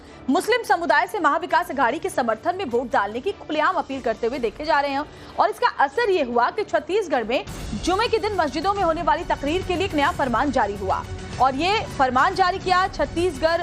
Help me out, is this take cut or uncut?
cut